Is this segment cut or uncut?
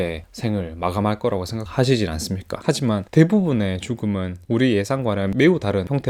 uncut